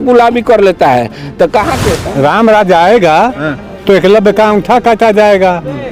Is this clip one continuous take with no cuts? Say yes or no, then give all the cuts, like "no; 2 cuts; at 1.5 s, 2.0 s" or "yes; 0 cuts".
no; 1 cut; at 1.9 s